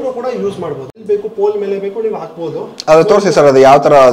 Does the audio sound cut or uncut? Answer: cut